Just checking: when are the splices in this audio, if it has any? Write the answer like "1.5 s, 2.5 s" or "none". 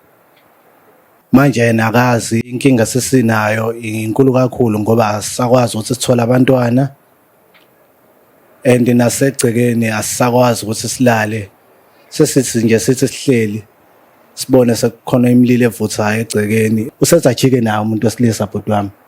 16.9 s